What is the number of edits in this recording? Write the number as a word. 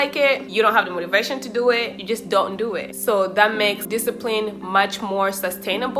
zero